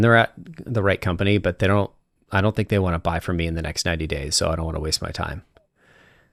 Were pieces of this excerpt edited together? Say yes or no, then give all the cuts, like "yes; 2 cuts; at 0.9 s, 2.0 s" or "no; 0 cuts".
no; 0 cuts